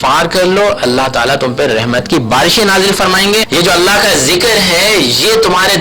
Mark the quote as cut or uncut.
cut